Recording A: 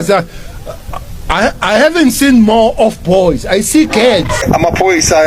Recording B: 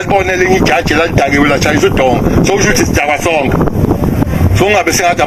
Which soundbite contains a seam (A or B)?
A